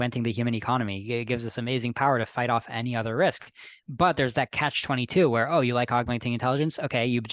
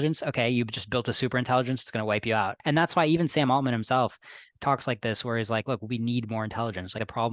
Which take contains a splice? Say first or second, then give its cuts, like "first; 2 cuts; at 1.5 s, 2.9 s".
second; 1 cut; at 2.5 s